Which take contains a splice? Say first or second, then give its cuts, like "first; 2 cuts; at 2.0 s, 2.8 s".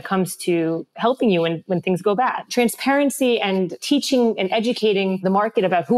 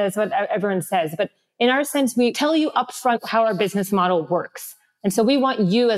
first; 3 cuts; at 2.4 s, 3.8 s, 5.2 s